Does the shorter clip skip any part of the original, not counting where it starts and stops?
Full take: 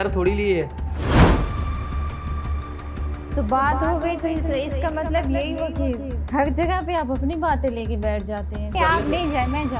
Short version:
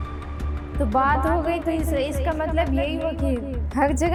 no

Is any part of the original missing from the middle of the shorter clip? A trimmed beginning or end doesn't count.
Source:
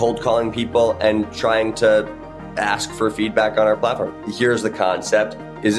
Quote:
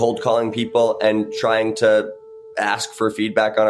no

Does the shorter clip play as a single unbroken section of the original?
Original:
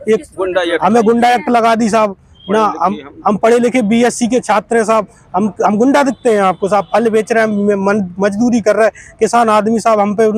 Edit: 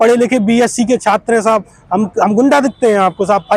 yes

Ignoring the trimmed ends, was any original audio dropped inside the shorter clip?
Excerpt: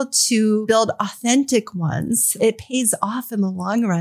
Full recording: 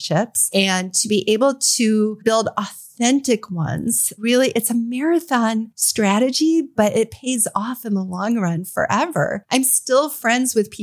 yes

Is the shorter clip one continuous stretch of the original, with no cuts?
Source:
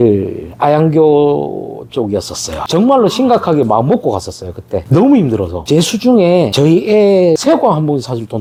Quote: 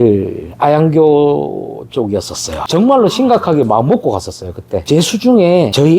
no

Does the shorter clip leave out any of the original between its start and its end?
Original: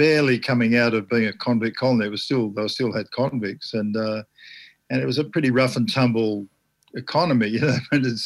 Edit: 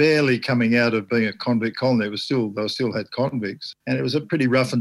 yes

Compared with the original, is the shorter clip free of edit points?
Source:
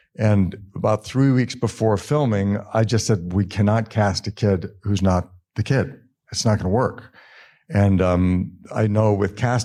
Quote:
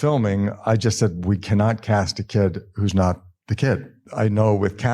no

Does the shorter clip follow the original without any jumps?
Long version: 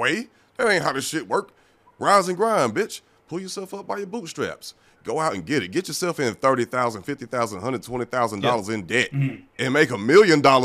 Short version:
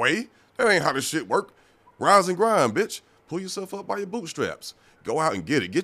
yes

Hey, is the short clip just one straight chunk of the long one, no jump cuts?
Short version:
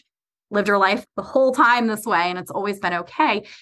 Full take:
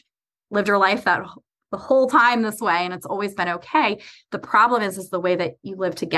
no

